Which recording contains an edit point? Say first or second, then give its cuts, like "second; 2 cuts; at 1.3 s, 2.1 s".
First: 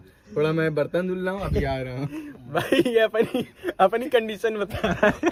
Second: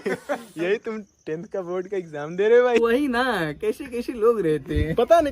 second; 1 cut; at 2.8 s